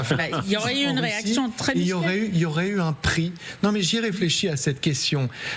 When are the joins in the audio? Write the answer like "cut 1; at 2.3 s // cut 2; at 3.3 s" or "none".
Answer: none